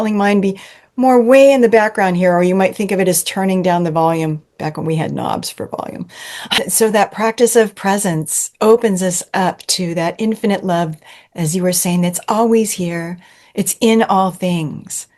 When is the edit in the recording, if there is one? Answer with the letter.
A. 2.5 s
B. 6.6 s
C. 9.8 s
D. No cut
B